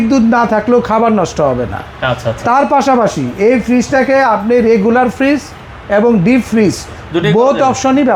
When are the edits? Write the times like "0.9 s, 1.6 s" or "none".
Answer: none